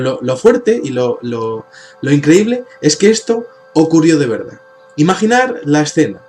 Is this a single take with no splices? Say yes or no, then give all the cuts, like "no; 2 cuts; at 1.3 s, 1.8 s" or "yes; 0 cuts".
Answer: yes; 0 cuts